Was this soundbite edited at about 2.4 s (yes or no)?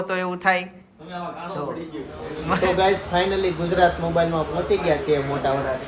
yes